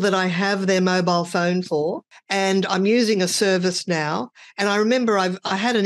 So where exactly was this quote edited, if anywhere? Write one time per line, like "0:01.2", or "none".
none